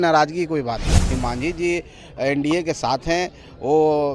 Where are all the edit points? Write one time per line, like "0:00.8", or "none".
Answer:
0:01.1